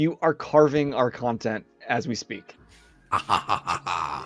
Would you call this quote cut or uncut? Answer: uncut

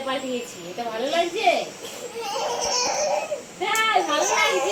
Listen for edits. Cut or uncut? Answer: uncut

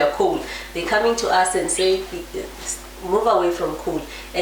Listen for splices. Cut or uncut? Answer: uncut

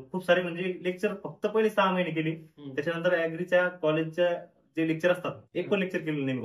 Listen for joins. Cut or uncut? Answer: uncut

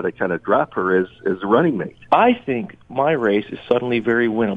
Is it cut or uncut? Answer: cut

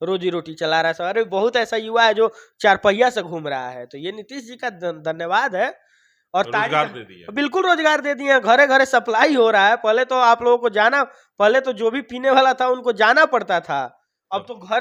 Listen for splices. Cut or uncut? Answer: uncut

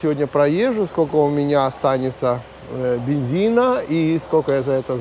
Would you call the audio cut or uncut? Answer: uncut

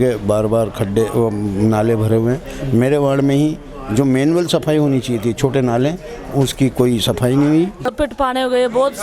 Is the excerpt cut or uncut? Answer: cut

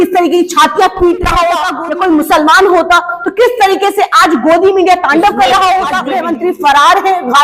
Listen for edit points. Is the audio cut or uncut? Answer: cut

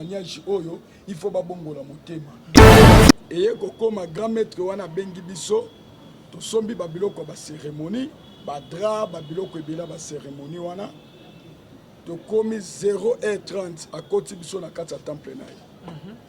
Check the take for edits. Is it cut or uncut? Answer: cut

